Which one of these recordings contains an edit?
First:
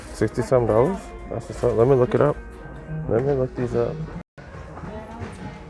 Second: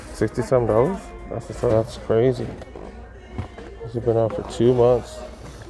second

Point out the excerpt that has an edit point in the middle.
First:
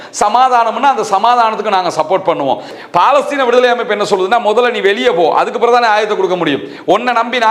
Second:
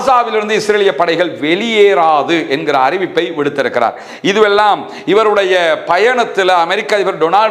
first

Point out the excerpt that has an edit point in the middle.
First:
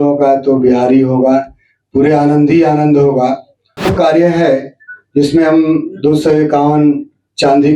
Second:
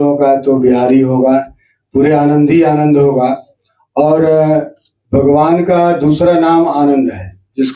first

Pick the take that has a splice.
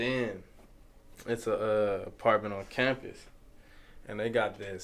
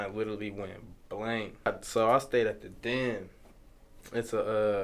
second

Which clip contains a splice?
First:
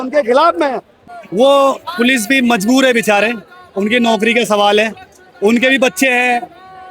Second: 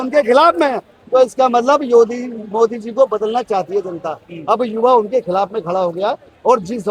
first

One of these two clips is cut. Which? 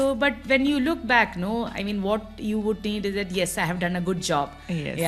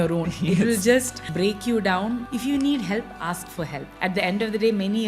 second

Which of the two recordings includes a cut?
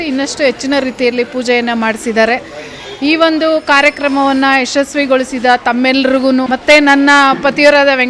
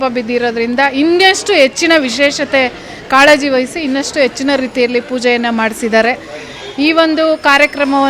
first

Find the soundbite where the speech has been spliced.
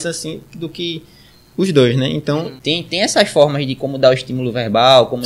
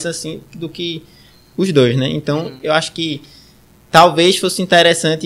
first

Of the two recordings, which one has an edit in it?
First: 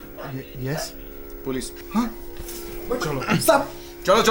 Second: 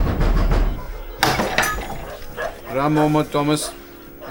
second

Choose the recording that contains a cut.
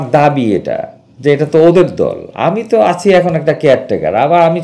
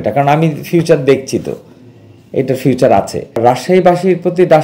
second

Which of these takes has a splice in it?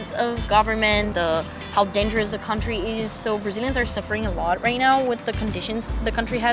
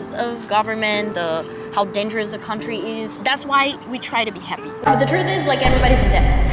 second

